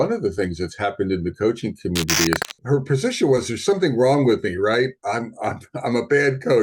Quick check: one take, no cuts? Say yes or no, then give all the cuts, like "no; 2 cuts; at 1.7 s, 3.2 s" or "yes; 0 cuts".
no; 1 cut; at 2.5 s